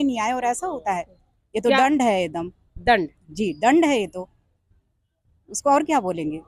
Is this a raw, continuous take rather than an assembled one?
yes; 0 cuts

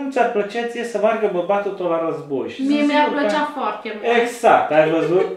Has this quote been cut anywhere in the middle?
no; 0 cuts

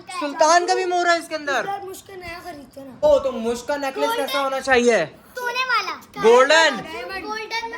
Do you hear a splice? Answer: yes; 1 cut; at 3.0 s

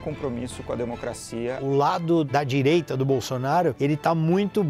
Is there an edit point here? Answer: yes; 3 cuts; at 1.6 s, 2.3 s, 3.8 s

